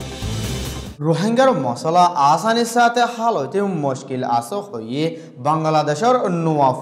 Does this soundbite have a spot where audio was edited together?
yes; 1 cut; at 0.9 s

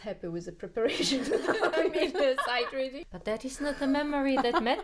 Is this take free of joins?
no; 1 cut; at 3.1 s

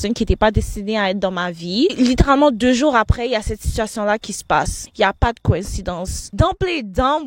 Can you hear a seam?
yes; 3 cuts; at 1.9 s, 4.8 s, 6.3 s

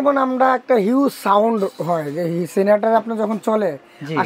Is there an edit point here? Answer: no; 0 cuts

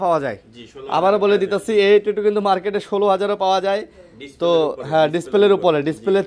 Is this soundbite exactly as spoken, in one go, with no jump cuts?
yes; 0 cuts

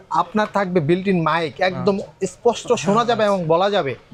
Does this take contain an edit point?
no; 0 cuts

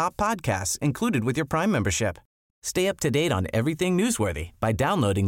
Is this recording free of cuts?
yes; 0 cuts

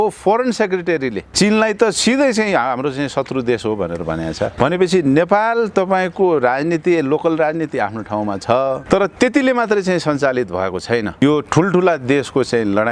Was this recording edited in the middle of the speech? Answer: yes; 4 cuts; at 1.2 s, 4.5 s, 8.8 s, 11.2 s

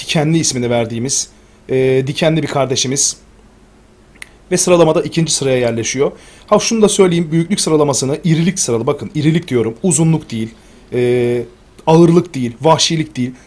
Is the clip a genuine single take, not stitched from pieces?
no; 1 cut; at 9.5 s

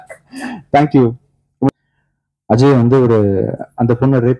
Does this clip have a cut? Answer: yes; 1 cut; at 1.7 s

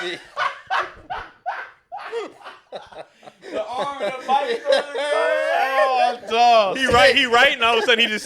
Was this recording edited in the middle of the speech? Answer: yes; 1 cut; at 6.7 s

